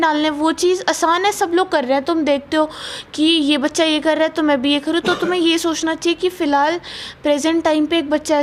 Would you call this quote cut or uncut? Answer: uncut